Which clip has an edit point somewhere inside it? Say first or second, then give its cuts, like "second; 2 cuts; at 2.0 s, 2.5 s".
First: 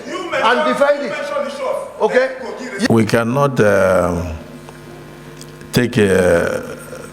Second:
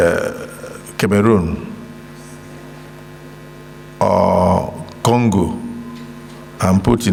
first; 1 cut; at 2.9 s